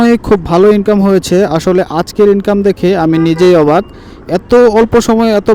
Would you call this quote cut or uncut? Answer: uncut